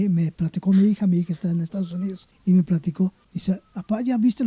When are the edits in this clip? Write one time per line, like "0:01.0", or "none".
0:02.3
0:03.3